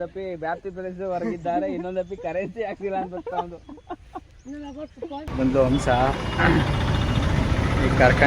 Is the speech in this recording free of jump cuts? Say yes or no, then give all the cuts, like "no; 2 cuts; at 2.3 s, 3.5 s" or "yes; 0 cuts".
no; 1 cut; at 5.3 s